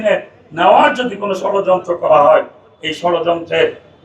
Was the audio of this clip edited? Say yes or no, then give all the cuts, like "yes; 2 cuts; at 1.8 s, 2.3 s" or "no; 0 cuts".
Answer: no; 0 cuts